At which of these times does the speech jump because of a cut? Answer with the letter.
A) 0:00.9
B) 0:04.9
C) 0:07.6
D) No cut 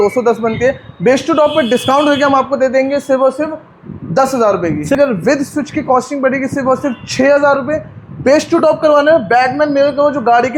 B